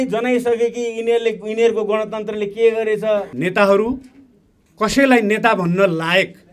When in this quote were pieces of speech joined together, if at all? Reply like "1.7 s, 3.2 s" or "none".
3.3 s